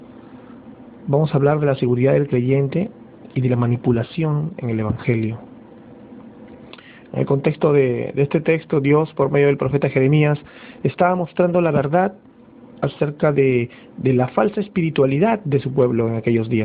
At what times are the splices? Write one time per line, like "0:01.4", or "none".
0:05.7